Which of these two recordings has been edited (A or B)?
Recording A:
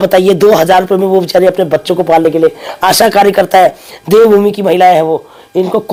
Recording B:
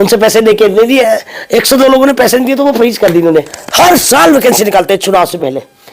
B